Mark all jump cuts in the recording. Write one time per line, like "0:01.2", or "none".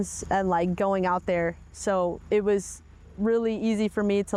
none